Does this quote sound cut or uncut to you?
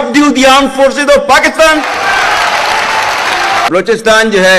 cut